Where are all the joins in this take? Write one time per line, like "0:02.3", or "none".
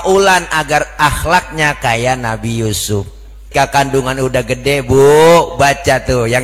0:03.4